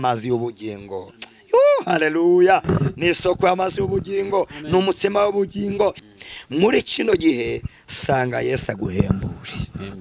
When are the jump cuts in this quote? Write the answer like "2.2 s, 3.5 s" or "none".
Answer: 6.0 s

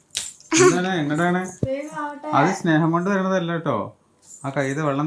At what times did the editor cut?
none

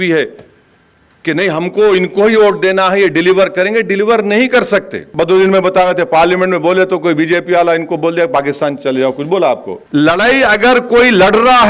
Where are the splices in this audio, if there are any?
5.0 s, 9.7 s

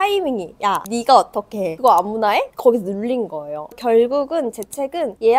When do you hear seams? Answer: 3.7 s

